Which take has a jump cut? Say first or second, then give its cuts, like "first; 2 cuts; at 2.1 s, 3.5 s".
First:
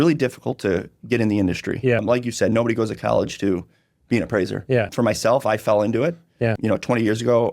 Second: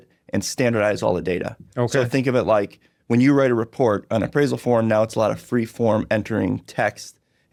first; 3 cuts; at 2.0 s, 4.9 s, 6.5 s